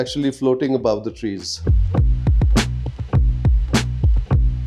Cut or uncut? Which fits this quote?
uncut